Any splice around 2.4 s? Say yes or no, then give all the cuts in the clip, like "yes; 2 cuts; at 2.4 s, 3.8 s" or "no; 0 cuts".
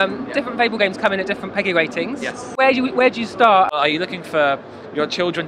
yes; 2 cuts; at 2.4 s, 3.7 s